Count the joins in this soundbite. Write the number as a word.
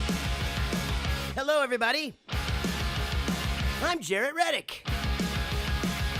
one